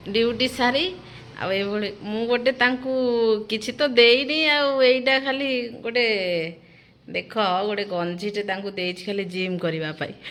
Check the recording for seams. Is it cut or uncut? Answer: uncut